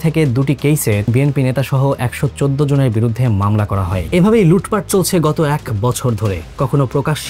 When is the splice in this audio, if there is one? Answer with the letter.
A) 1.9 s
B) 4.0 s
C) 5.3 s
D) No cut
B